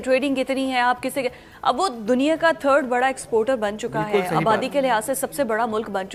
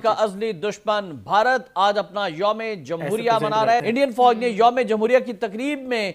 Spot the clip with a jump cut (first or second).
second